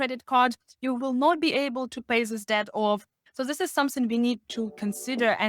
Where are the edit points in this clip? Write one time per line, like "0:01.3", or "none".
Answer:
0:03.2